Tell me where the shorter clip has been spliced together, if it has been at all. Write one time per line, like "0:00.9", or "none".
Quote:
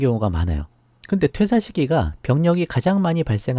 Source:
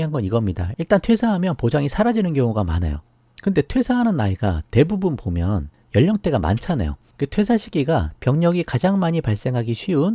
0:01.3

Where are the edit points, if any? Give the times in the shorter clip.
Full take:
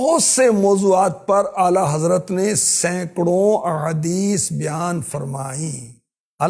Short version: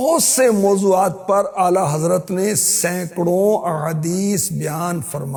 none

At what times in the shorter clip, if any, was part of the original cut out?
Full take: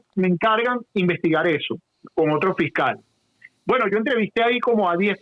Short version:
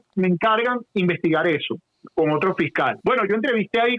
0:03.0

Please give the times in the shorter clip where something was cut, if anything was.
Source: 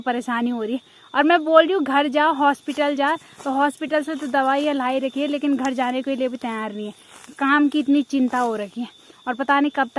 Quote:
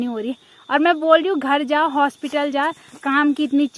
0:02.9

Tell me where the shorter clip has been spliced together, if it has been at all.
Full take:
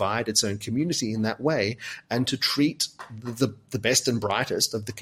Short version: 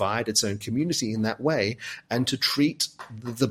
none

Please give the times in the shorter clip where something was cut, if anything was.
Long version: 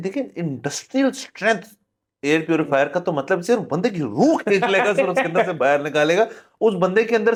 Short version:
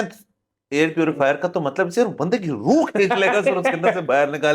none

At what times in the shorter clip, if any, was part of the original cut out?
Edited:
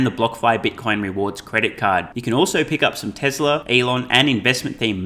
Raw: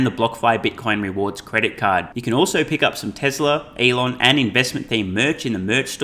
0:03.6

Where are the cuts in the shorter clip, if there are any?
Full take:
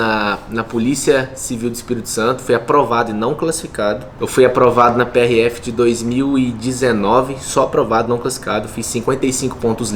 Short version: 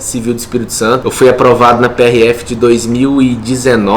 0:01.0

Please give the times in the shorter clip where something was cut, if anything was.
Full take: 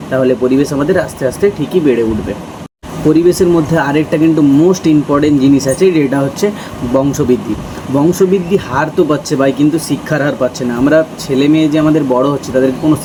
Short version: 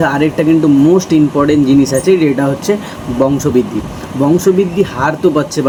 none

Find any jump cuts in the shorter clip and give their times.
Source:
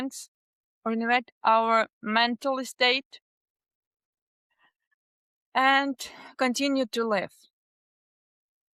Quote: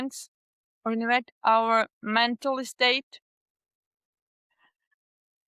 none

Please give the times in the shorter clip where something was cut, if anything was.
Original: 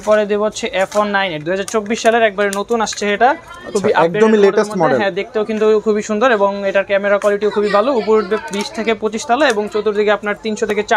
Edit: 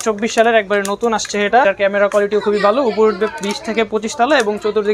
0:01.6

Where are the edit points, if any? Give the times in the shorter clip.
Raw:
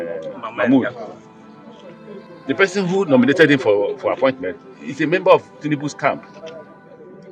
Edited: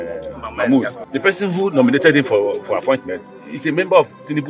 0:01.0

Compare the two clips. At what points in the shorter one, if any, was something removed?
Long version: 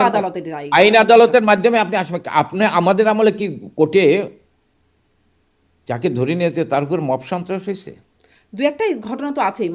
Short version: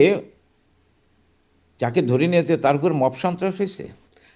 none

